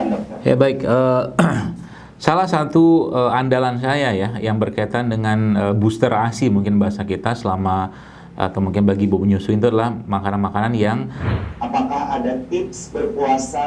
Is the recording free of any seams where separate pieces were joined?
no; 1 cut; at 11.3 s

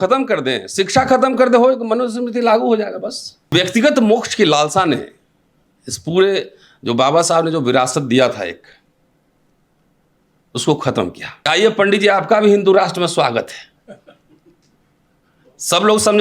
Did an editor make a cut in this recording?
yes; 2 cuts; at 3.5 s, 11.3 s

